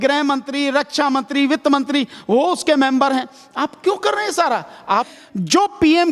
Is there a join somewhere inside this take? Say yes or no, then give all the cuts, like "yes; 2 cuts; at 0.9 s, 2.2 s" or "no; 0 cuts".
yes; 1 cut; at 5.1 s